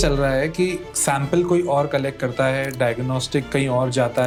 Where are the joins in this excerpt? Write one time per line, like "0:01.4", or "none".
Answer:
none